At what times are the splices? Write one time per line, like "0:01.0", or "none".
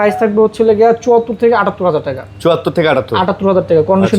none

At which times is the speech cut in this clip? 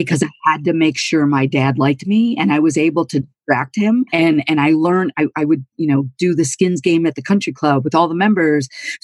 0:04.1

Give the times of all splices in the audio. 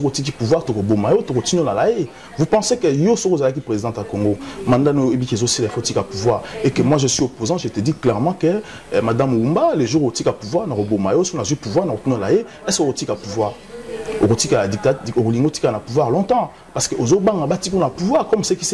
none

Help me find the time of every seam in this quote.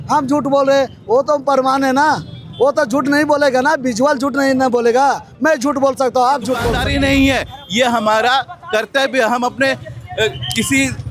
0:06.8

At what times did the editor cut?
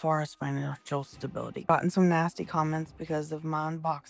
0:01.7

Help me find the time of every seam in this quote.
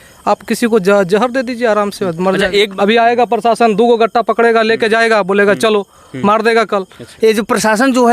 0:02.7
0:07.0

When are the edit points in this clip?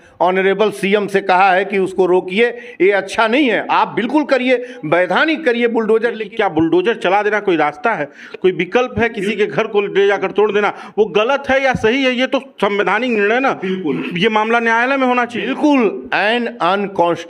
0:06.2
0:15.4

